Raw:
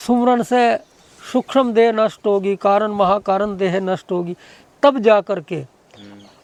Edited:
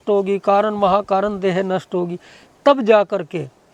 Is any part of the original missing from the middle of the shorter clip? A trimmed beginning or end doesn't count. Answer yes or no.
no